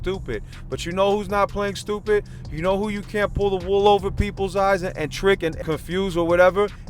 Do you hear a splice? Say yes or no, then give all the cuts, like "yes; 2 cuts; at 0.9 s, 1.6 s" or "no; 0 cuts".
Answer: yes; 1 cut; at 5.6 s